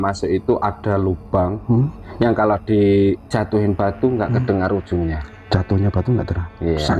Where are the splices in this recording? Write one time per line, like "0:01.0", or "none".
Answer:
0:02.0
0:05.3